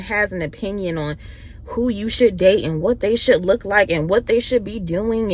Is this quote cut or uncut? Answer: uncut